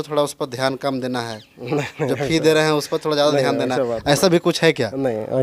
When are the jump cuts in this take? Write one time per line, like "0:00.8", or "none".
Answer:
none